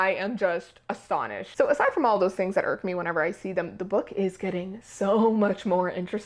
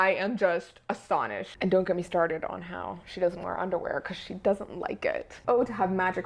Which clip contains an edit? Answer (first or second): second